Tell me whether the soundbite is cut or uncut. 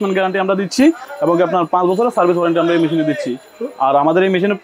uncut